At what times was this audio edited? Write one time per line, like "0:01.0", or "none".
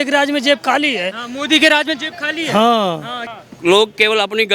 0:03.2

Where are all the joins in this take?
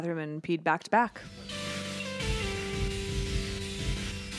0:01.3

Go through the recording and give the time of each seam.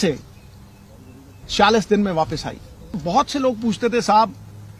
0:03.0

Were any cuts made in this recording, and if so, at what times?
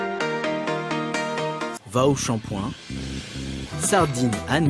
0:01.7

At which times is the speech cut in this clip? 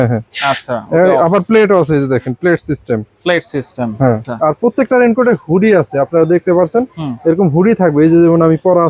0:04.3

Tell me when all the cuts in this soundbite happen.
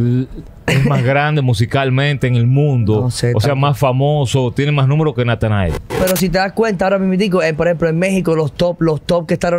0:06.0

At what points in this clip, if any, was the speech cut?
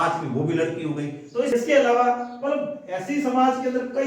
0:01.5

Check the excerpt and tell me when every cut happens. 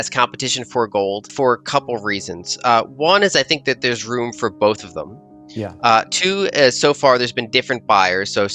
0:01.3

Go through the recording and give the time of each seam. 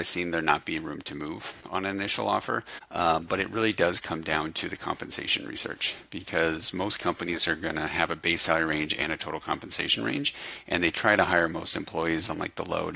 0:02.9

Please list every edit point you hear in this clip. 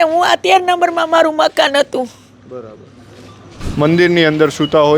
0:03.6

